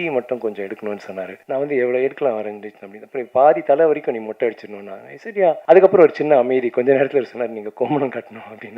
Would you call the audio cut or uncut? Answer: cut